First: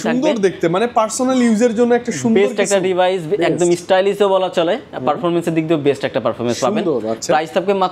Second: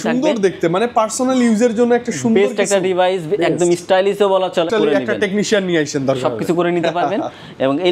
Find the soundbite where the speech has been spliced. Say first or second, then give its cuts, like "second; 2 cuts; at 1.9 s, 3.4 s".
second; 1 cut; at 4.7 s